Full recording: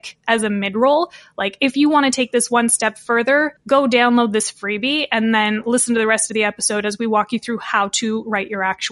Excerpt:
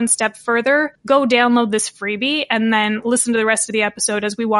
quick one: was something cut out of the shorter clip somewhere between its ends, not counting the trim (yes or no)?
no